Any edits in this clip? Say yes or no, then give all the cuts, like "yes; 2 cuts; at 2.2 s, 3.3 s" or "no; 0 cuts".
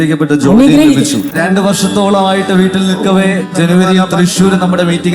yes; 1 cut; at 1.3 s